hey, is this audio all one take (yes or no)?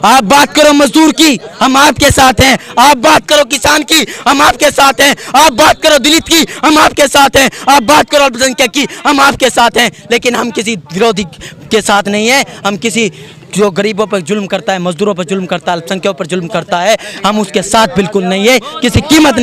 yes